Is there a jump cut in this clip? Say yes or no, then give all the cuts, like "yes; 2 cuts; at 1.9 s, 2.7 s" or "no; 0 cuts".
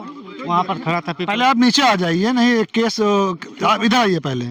no; 0 cuts